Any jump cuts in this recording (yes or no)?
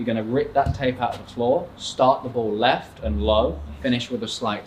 yes